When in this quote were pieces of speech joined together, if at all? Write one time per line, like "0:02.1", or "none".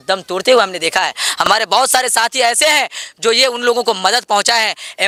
none